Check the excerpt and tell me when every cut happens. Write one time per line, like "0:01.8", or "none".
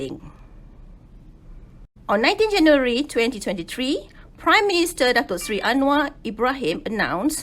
0:01.9